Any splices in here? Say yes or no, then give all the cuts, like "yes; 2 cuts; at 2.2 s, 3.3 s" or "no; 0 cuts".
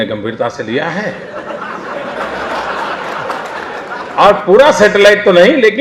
yes; 1 cut; at 1.2 s